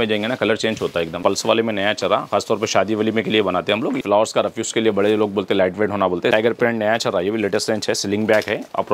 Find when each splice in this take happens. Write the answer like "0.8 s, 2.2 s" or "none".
1.2 s, 4.0 s, 6.3 s